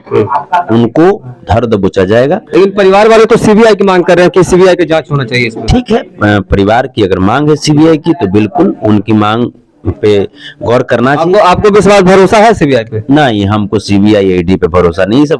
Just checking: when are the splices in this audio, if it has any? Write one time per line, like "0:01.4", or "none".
none